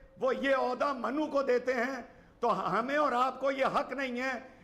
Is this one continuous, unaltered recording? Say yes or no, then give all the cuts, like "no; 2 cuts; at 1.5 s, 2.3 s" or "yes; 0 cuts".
yes; 0 cuts